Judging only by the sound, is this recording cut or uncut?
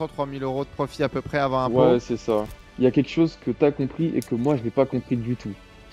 cut